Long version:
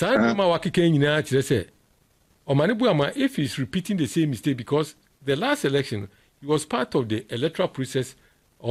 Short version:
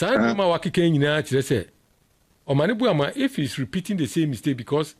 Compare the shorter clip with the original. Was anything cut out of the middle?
no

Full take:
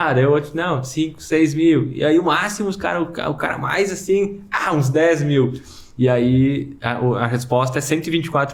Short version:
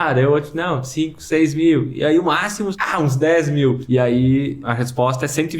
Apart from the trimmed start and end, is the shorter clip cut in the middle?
yes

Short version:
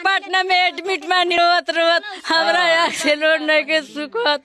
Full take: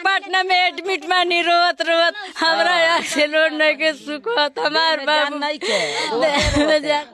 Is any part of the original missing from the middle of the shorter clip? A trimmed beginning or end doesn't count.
yes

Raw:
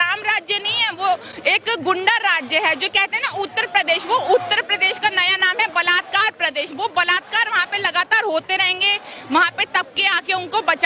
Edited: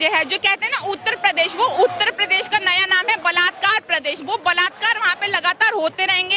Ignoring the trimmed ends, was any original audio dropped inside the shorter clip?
no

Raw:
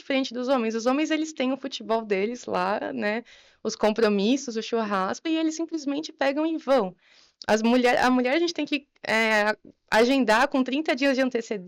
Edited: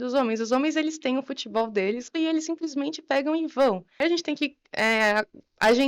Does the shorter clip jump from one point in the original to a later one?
yes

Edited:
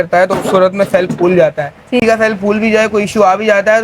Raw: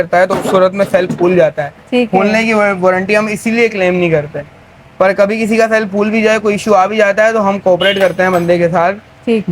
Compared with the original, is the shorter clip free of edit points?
no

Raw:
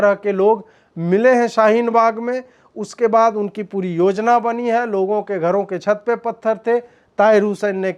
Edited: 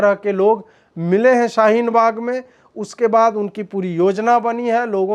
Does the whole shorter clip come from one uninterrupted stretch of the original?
yes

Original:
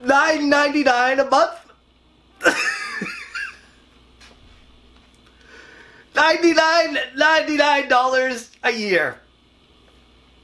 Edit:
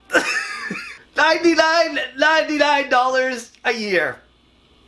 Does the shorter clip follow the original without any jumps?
no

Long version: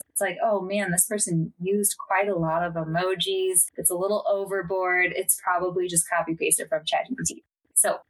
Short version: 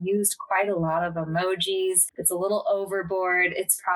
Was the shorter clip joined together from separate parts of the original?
no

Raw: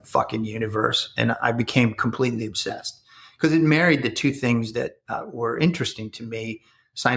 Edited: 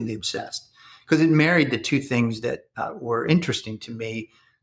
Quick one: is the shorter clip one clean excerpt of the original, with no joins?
yes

